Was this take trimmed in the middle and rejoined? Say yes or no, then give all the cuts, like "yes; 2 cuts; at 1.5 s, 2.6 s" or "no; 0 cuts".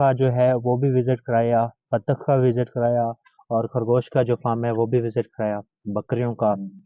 no; 0 cuts